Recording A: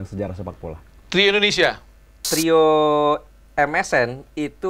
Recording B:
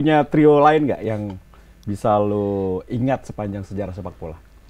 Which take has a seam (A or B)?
A